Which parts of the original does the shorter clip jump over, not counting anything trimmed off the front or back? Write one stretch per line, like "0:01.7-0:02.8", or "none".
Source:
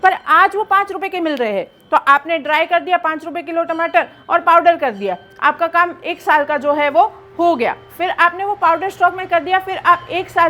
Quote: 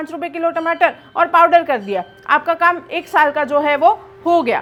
none